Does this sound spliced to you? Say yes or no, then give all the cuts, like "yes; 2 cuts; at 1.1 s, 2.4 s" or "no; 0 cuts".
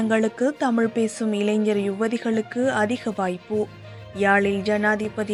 no; 0 cuts